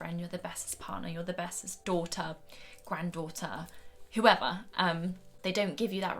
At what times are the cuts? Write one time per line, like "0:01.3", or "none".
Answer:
0:01.8
0:05.3